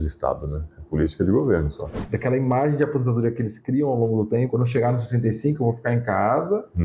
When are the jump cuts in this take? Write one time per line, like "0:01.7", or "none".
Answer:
0:02.0
0:04.5